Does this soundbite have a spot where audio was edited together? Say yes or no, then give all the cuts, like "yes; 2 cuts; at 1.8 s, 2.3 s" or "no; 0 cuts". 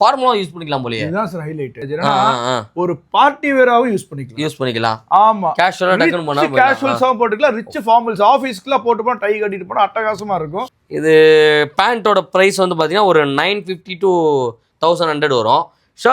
yes; 2 cuts; at 1.8 s, 10.6 s